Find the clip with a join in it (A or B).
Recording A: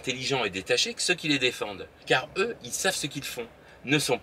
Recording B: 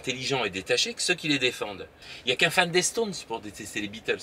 B